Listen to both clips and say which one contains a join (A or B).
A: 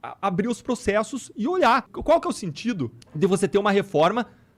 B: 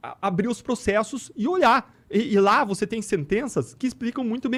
A